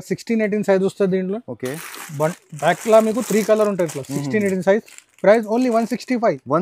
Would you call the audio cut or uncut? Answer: uncut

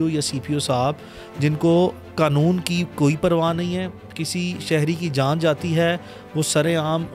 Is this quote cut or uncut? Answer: uncut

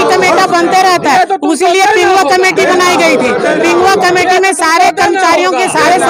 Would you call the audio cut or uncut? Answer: uncut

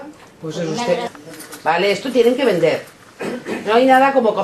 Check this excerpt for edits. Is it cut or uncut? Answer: uncut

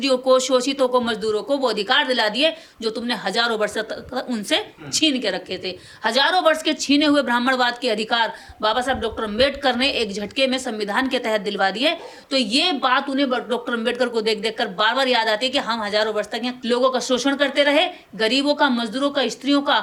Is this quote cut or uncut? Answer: uncut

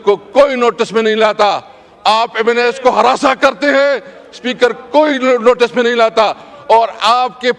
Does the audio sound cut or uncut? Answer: uncut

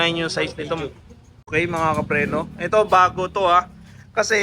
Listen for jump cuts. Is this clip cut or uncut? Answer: cut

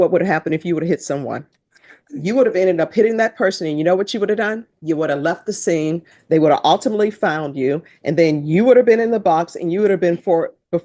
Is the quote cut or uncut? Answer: uncut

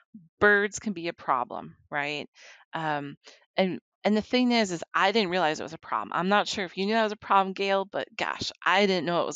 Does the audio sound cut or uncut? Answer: uncut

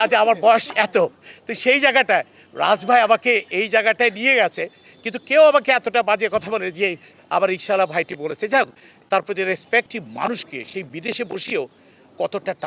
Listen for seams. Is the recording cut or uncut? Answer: cut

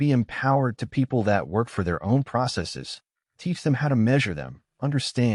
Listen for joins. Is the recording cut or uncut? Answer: uncut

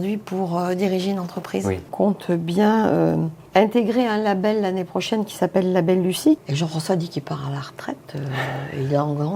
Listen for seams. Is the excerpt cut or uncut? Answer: cut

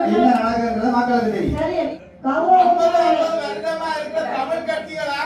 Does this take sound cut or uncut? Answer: cut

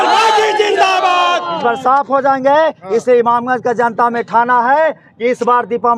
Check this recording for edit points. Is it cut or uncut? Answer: uncut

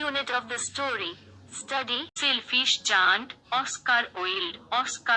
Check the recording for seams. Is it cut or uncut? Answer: cut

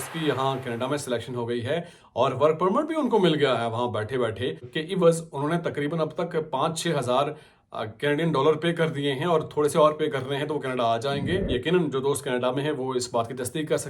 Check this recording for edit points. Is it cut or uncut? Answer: cut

